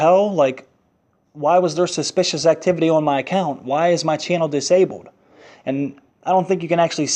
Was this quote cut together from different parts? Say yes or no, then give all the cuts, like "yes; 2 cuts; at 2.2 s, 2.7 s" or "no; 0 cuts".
no; 0 cuts